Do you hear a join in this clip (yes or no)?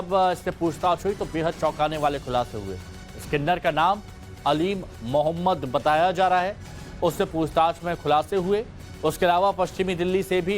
yes